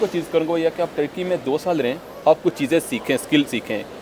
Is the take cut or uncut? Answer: uncut